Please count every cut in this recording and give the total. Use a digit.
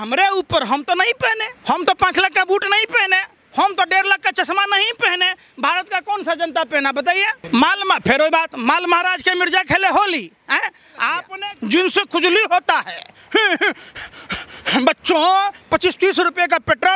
3